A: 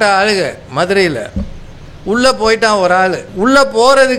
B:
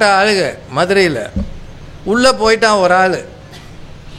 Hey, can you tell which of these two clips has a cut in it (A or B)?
A